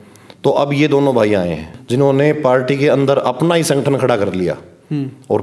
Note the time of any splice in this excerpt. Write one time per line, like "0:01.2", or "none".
0:01.7